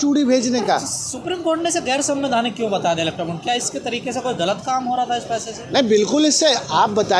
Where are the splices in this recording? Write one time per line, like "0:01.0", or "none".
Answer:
none